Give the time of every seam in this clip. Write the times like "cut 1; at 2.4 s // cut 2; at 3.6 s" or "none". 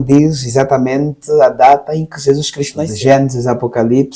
cut 1; at 2.8 s